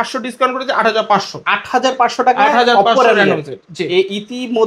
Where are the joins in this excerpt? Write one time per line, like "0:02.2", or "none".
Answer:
none